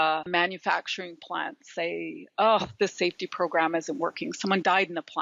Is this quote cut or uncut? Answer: uncut